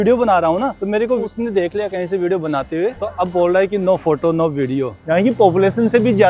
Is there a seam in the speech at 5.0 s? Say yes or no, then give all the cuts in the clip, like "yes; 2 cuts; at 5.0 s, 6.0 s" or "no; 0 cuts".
yes; 3 cuts; at 1.1 s, 3.0 s, 5.0 s